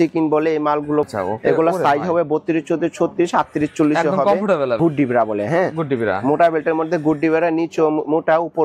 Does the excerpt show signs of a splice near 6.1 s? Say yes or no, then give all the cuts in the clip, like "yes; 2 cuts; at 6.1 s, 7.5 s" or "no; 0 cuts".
no; 2 cuts; at 1.1 s, 4.8 s